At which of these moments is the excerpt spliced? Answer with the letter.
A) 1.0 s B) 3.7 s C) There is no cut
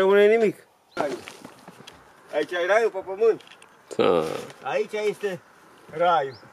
A